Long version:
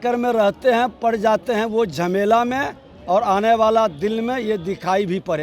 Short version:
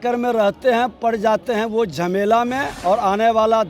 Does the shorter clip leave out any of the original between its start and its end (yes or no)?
yes